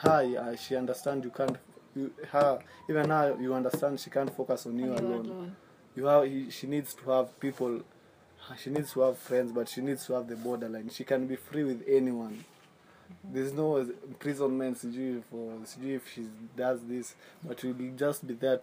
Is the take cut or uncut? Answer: uncut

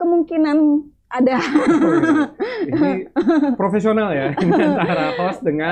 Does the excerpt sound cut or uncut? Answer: uncut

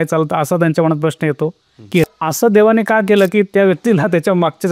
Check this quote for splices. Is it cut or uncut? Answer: cut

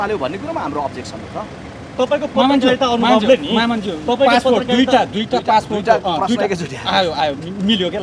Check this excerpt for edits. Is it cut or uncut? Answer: uncut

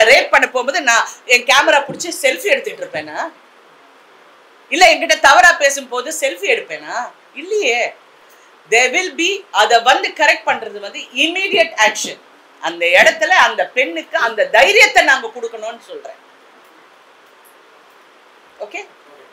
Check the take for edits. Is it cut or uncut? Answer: uncut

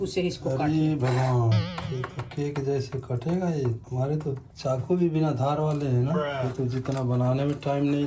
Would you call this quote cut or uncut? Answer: cut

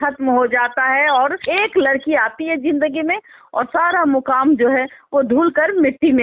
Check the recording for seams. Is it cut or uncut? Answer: cut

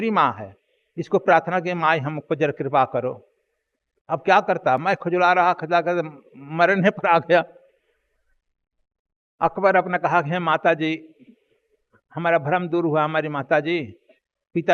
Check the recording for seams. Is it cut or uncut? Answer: uncut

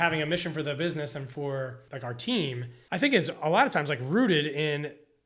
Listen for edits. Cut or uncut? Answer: cut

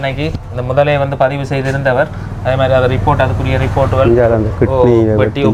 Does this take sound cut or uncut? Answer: uncut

